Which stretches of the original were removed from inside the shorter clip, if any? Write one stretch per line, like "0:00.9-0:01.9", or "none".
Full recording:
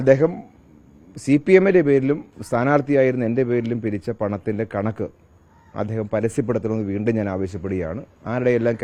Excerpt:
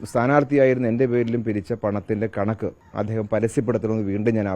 0:05.2-0:05.6